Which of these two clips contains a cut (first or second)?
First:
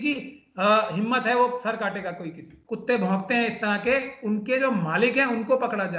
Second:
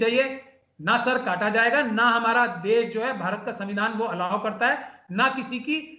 first